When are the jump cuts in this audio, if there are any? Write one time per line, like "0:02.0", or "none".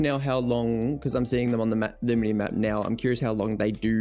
none